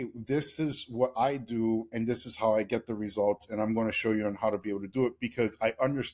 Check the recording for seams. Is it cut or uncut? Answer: uncut